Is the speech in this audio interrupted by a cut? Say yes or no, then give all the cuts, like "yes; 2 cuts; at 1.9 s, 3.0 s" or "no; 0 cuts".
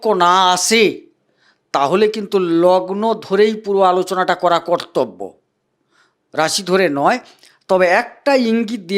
no; 0 cuts